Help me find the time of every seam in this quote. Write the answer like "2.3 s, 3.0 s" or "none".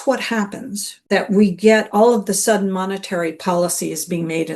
1.1 s